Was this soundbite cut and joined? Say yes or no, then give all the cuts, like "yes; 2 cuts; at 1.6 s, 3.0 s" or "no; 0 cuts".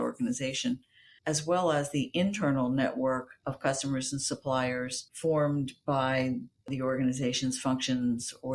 no; 0 cuts